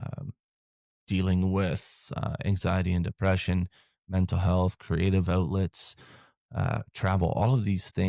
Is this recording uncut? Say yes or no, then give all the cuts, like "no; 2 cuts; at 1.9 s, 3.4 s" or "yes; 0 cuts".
yes; 0 cuts